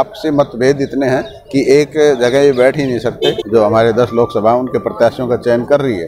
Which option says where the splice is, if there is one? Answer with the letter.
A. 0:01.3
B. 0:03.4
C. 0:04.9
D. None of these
B